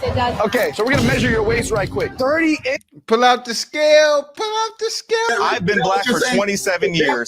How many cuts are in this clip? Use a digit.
1